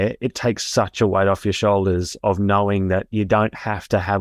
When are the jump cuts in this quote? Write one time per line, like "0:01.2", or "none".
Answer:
none